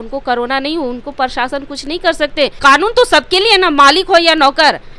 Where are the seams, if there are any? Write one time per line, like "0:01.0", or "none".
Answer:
0:02.6